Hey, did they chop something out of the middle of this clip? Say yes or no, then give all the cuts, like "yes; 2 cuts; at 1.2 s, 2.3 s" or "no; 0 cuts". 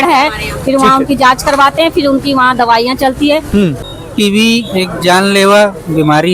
yes; 1 cut; at 3.8 s